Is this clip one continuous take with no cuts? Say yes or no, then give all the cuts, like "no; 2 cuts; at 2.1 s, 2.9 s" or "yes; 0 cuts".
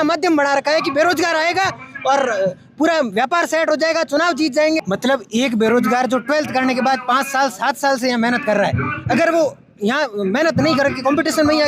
no; 1 cut; at 4.8 s